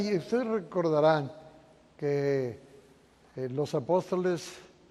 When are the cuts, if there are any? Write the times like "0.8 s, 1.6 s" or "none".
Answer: none